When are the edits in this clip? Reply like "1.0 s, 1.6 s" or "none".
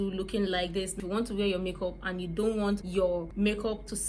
1.0 s, 3.2 s